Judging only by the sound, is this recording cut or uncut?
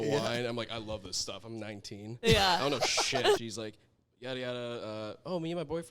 cut